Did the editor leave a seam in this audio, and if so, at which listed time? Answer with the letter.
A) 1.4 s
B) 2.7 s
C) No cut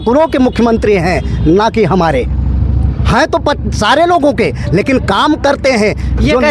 C